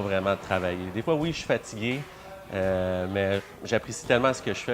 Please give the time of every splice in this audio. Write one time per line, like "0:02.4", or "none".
none

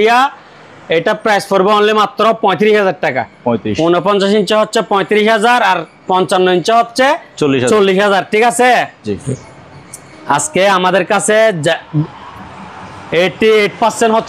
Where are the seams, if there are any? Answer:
none

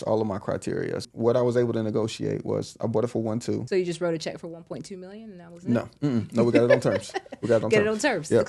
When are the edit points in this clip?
0:01.1
0:03.6

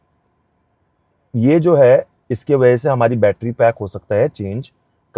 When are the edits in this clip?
none

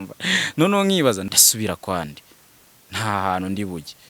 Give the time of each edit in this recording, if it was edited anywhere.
0:01.2

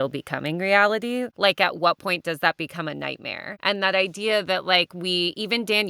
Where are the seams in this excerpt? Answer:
0:01.3
0:03.4

